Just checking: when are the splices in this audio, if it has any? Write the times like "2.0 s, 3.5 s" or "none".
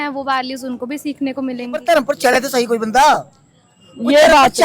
1.8 s